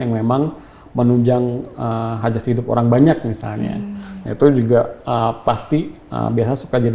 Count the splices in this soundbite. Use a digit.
0